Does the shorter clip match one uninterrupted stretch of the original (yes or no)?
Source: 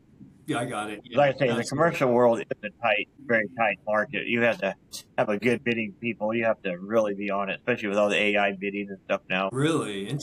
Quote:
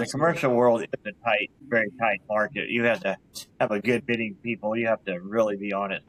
yes